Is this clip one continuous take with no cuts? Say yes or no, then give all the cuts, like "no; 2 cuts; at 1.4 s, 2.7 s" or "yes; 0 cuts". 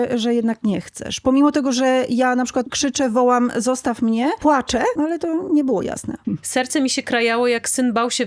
no; 3 cuts; at 2.7 s, 4.5 s, 6.1 s